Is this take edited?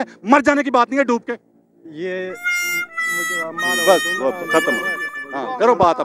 no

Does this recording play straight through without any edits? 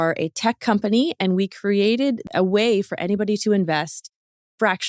no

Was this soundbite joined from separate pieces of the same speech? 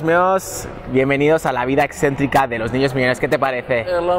no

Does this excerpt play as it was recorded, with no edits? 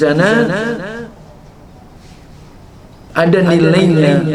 yes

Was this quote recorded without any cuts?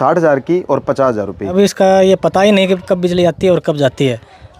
no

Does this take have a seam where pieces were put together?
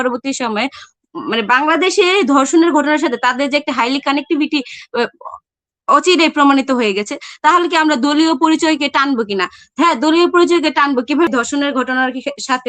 yes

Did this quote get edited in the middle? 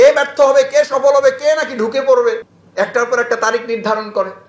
no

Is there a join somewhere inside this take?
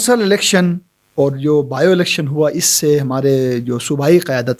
no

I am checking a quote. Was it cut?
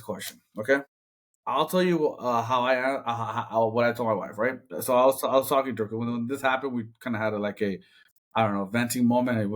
no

